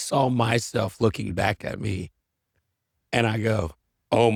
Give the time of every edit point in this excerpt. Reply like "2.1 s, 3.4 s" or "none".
none